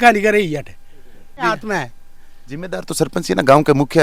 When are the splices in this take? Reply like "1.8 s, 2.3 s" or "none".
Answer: 1.4 s